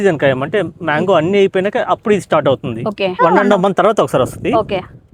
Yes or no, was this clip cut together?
no